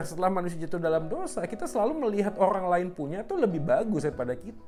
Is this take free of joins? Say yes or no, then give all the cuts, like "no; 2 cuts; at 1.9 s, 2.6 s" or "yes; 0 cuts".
yes; 0 cuts